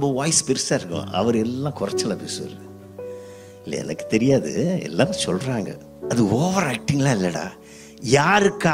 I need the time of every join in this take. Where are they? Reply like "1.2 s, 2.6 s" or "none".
5.9 s